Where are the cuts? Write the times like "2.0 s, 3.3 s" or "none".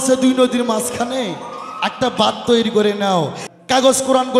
3.4 s